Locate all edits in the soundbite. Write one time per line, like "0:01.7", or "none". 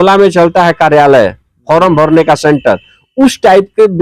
none